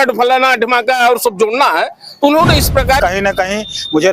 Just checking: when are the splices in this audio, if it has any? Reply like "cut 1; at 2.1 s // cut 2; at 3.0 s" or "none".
cut 1; at 3.0 s